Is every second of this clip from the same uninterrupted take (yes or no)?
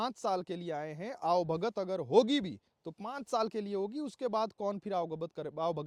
yes